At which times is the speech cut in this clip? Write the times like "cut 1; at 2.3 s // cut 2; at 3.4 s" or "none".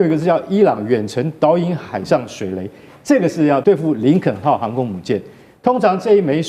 cut 1; at 3.6 s